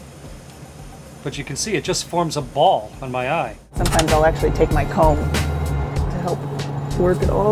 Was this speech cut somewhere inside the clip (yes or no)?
yes